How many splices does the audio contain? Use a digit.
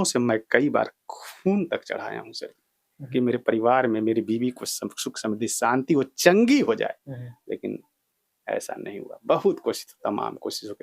0